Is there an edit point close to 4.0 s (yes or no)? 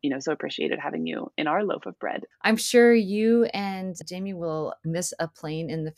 yes